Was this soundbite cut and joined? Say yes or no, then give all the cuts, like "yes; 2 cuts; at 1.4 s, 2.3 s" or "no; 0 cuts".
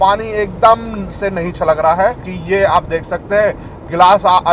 yes; 1 cut; at 2.3 s